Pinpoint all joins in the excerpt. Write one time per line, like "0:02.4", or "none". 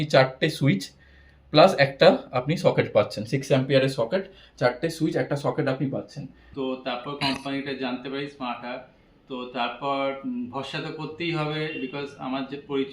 0:06.5